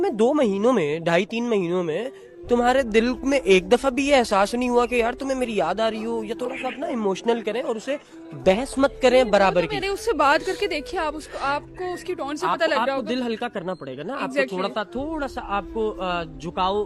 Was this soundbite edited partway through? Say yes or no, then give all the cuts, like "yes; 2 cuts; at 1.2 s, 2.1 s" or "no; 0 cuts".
no; 0 cuts